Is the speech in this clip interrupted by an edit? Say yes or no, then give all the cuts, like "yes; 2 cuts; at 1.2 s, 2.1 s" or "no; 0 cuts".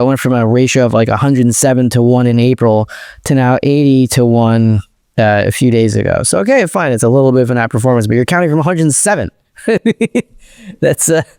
no; 0 cuts